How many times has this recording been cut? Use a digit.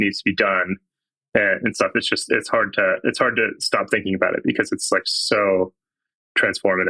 0